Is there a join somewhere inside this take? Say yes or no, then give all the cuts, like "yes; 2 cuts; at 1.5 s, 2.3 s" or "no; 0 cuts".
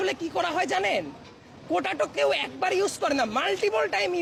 no; 0 cuts